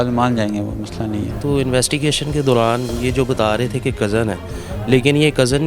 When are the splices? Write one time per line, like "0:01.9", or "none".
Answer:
0:01.4